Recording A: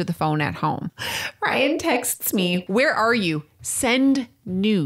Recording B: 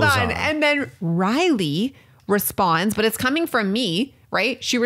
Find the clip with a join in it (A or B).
A